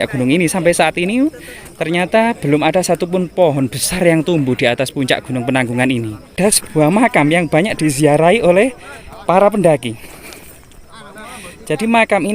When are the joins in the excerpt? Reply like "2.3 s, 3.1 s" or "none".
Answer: 6.3 s